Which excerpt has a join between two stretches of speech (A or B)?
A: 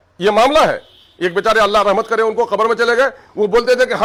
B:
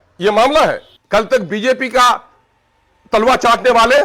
B